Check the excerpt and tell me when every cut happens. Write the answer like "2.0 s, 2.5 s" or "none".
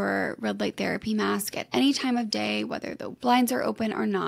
3.1 s